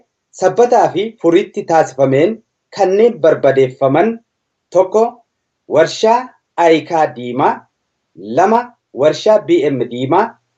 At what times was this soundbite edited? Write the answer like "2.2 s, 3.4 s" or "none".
3.6 s